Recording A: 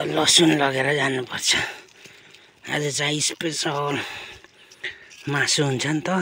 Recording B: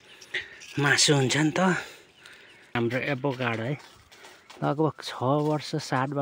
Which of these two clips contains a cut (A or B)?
B